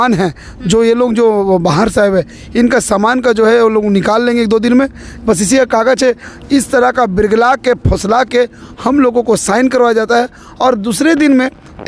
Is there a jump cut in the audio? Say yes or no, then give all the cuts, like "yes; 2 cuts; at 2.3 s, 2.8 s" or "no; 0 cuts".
no; 0 cuts